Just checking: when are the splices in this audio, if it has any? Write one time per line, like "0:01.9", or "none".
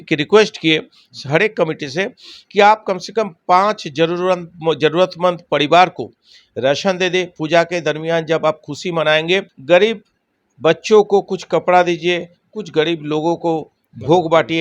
0:09.5